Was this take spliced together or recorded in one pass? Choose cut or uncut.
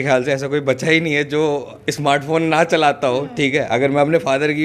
uncut